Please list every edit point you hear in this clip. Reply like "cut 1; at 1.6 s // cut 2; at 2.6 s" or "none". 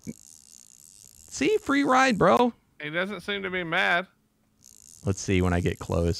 none